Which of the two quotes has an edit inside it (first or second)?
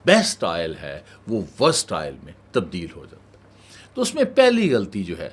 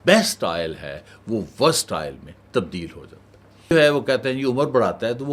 second